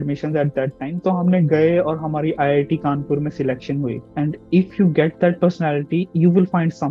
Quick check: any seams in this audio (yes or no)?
yes